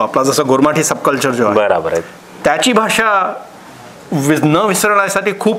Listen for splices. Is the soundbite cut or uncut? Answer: uncut